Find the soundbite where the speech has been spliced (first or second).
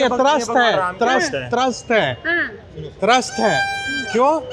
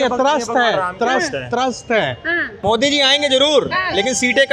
second